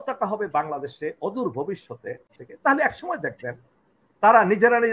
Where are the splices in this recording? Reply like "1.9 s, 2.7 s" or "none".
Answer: 2.3 s